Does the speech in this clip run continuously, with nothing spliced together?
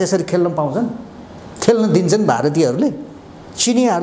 yes; 0 cuts

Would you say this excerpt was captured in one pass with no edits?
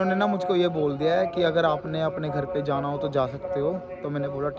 yes; 0 cuts

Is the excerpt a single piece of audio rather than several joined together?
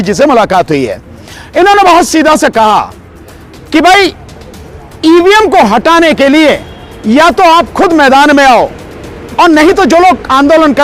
yes; 0 cuts

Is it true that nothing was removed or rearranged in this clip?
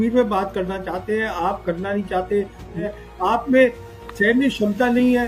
no; 1 cut; at 2.8 s

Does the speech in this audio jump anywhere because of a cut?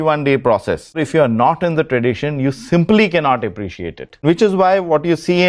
yes; 2 cuts; at 1.0 s, 4.2 s

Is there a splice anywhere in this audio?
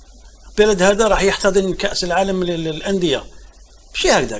no; 0 cuts

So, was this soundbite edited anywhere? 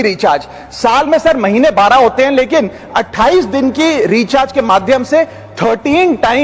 no; 0 cuts

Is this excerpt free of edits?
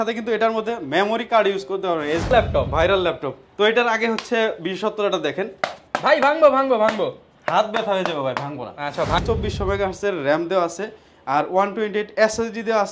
no; 2 cuts; at 2.3 s, 9.2 s

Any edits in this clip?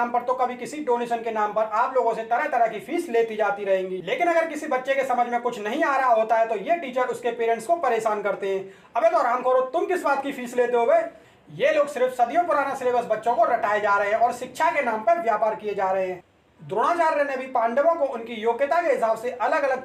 no; 0 cuts

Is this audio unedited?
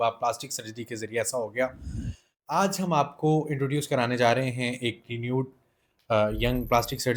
yes; 0 cuts

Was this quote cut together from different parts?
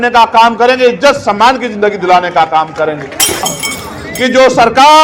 yes; 1 cut; at 3.6 s

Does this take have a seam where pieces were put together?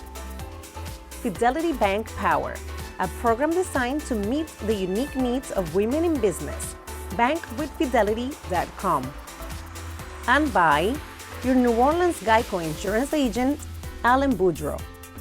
yes; 1 cut; at 1.2 s

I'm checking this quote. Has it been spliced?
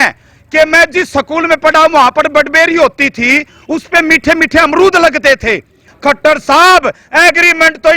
yes; 1 cut; at 5.9 s

